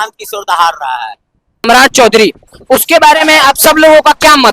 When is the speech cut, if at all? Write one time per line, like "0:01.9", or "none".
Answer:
0:01.7